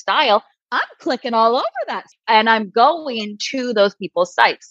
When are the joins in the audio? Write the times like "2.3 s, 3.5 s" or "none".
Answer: 2.1 s